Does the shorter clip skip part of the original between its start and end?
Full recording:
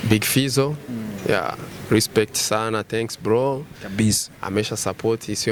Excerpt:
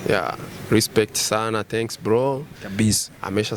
no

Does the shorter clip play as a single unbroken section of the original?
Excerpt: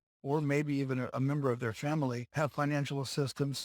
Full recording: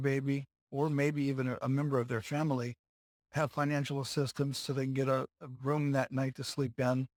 no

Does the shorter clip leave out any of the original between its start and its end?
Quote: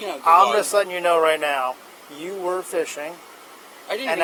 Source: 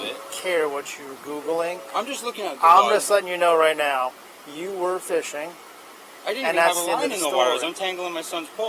no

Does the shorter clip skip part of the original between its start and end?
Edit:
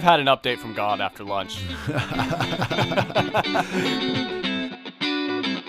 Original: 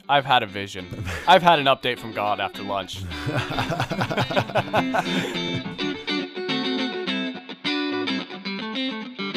yes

